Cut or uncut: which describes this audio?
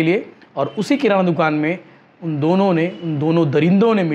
uncut